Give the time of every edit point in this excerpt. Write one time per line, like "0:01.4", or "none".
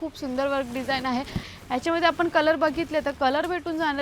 0:01.5